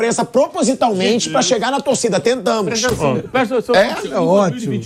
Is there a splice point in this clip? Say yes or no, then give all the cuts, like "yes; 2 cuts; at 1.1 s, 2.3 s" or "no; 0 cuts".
no; 0 cuts